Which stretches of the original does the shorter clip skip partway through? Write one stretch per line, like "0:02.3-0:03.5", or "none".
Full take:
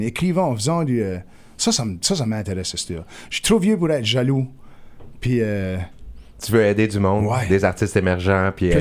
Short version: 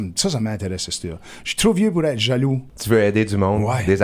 0:04.6-0:06.3

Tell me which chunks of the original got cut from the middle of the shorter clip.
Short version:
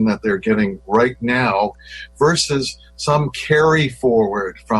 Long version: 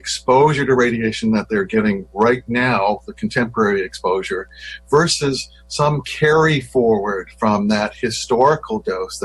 0:03.1-0:04.6

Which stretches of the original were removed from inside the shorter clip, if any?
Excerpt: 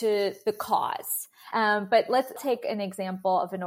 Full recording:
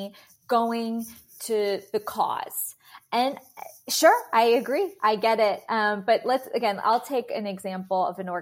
0:02.9-0:05.6
0:06.5-0:07.0

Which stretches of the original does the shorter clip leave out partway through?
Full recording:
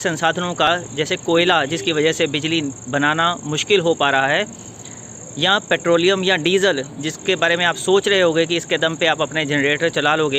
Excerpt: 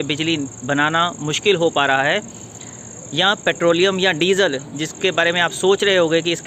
none

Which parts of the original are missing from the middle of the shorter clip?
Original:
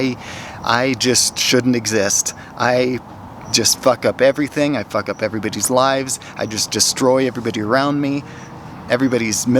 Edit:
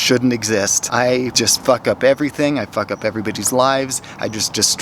0:02.4-0:03.2

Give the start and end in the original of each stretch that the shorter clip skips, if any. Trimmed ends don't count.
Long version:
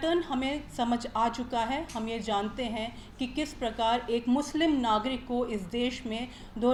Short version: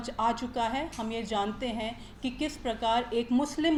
none

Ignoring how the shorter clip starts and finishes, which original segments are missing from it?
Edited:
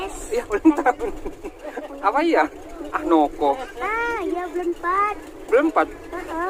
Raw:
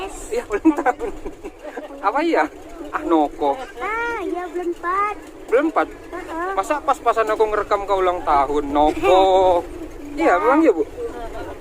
none

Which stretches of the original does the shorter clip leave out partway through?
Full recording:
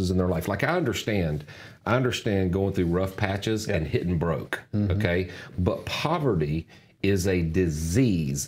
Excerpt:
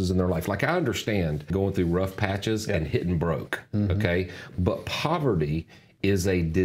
0:01.5-0:02.5

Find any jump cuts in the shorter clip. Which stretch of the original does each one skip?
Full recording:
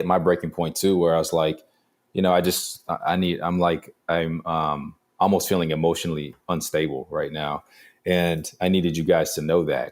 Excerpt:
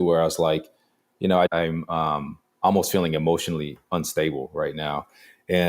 0:02.4-0:04.1

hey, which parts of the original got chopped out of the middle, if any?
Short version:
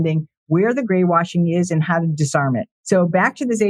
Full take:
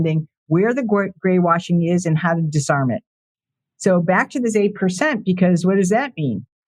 0:00.8-0:01.2
0:03.1-0:03.7

